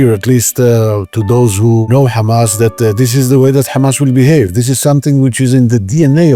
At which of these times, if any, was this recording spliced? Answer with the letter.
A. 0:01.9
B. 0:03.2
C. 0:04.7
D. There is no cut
A